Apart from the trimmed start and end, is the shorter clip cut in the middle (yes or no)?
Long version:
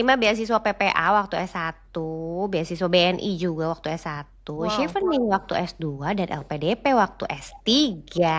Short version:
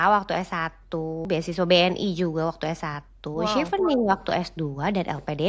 yes